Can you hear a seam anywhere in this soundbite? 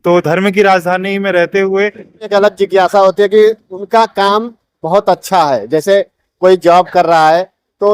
yes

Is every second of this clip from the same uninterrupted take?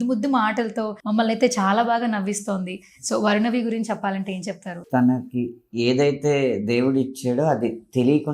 no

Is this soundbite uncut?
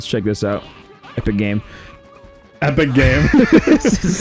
yes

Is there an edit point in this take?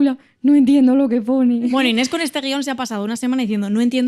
yes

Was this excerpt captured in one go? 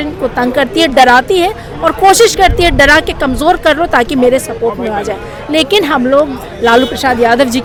yes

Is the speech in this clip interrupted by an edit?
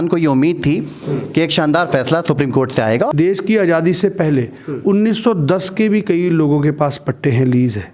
yes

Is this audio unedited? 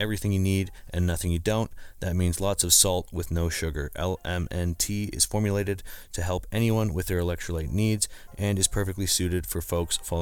yes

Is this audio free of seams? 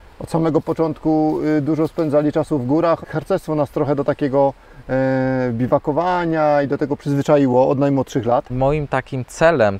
no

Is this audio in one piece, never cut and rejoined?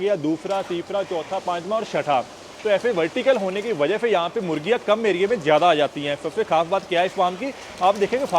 yes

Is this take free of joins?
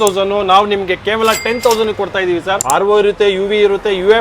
no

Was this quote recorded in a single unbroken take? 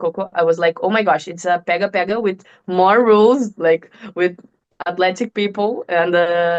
yes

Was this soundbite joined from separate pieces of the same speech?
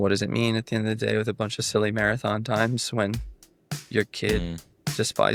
no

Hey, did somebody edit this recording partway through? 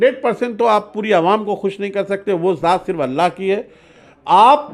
no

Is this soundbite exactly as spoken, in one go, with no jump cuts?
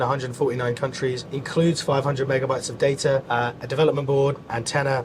no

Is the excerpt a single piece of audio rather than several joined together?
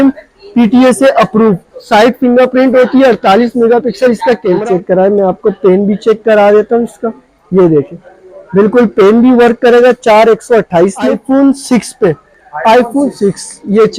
no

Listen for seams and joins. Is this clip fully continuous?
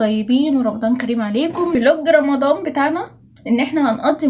yes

